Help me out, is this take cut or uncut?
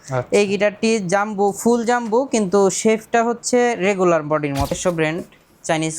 cut